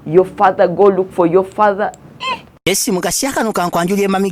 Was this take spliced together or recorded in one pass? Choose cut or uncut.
cut